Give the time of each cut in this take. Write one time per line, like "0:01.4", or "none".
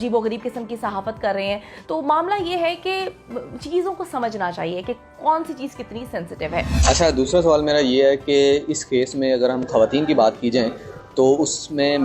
none